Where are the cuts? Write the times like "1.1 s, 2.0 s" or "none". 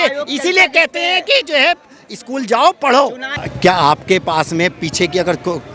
3.3 s